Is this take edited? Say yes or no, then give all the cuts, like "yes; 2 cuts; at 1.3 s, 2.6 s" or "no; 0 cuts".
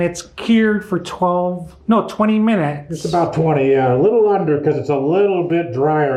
no; 0 cuts